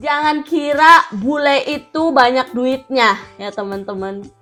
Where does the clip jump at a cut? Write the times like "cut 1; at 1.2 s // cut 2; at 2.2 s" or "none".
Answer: none